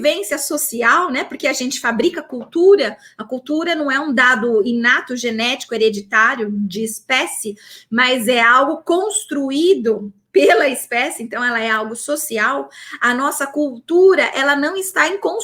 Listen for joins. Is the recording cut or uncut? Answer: uncut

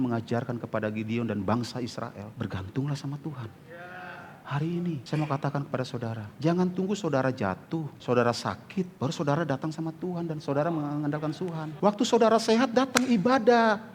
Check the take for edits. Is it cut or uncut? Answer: cut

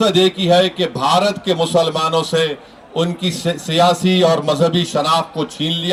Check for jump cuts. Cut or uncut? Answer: uncut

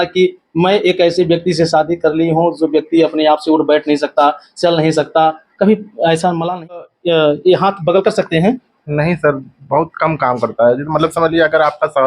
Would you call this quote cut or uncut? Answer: cut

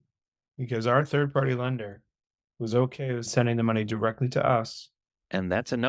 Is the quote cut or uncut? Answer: uncut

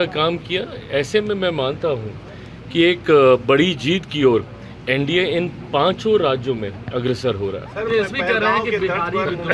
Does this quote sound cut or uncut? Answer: uncut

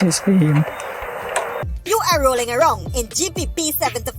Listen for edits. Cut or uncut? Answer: cut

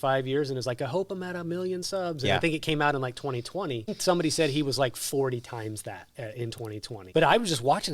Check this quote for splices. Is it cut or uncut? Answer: cut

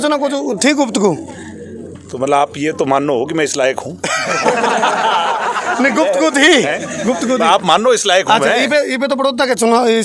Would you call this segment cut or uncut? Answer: uncut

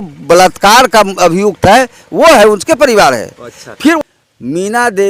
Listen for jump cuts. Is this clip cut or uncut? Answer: cut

